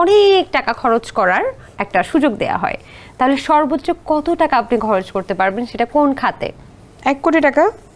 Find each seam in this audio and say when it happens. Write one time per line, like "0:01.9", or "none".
none